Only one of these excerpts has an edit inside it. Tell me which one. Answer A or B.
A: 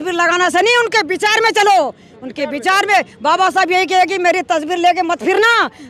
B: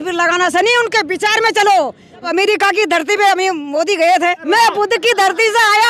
B